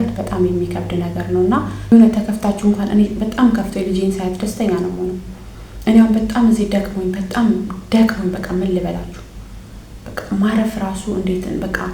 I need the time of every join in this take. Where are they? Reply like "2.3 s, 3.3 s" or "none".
1.9 s